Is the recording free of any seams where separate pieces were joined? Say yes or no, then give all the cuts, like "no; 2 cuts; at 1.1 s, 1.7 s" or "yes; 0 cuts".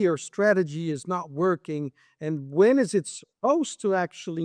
yes; 0 cuts